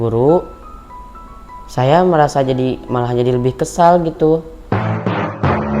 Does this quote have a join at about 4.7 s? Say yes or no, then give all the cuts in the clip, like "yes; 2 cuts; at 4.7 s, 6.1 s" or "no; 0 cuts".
yes; 1 cut; at 4.7 s